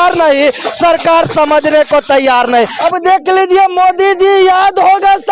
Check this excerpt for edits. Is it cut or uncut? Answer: cut